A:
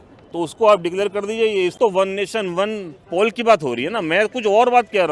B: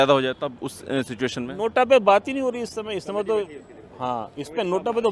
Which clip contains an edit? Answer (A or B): A